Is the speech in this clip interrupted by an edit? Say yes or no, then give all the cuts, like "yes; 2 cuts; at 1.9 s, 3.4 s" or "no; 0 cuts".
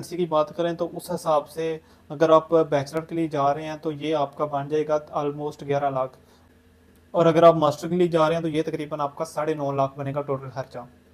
no; 0 cuts